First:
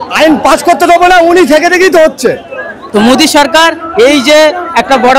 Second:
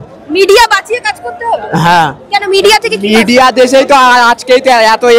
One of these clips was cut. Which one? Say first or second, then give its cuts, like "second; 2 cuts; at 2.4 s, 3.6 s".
first; 1 cut; at 2.8 s